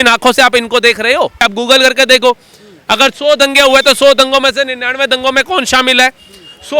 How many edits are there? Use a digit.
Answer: 1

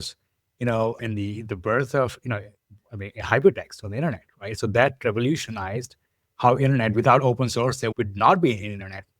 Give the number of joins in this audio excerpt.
1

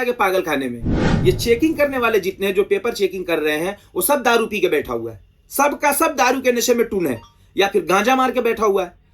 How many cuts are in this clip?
1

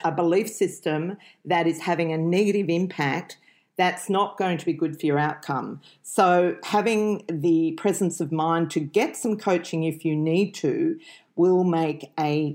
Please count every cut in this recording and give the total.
0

